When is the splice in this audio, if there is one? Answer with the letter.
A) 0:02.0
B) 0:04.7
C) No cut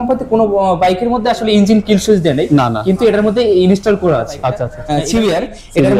B